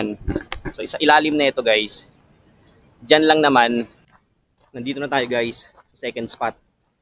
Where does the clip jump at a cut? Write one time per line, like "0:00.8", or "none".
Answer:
0:04.2

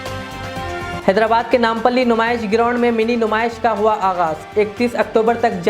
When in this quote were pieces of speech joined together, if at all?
0:01.0

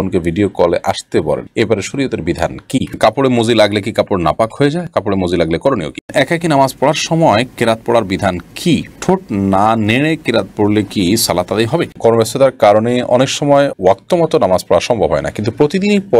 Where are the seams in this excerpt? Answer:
0:02.9
0:06.0
0:11.9

